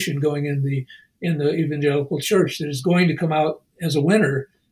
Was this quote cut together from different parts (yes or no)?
no